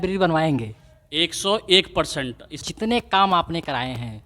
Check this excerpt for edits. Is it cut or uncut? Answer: cut